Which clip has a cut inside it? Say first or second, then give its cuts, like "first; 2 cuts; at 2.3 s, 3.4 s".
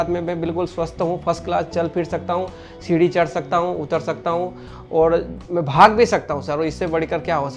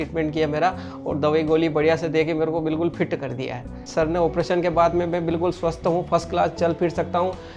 second; 1 cut; at 3.8 s